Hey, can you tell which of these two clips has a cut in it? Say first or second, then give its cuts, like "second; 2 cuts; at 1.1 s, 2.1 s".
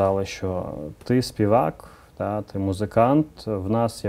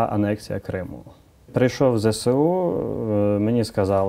second; 1 cut; at 1.5 s